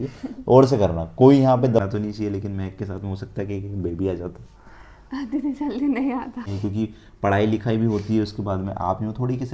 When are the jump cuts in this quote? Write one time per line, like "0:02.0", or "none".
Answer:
0:01.8
0:06.5